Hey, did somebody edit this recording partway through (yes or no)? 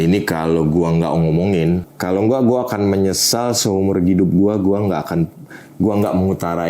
yes